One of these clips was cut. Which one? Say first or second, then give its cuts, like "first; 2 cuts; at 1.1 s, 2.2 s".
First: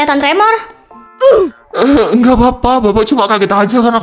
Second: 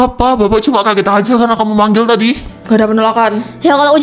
second; 1 cut; at 2.5 s